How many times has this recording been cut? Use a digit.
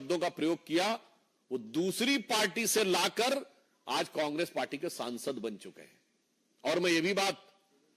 0